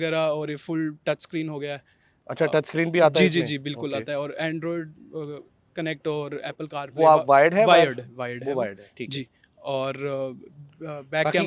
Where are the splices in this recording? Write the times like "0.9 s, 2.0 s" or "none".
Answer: none